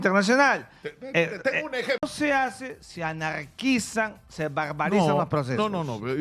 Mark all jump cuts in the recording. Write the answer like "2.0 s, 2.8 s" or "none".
2.1 s